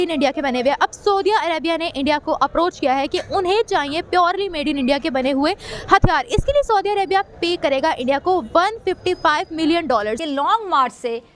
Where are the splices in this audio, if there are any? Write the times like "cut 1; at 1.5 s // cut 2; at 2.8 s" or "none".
cut 1; at 10.2 s